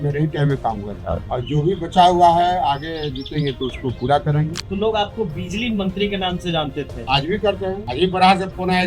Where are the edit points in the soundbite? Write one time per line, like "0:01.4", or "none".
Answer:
0:01.2
0:04.6
0:07.0
0:07.8